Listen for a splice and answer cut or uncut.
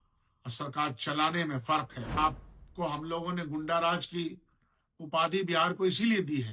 cut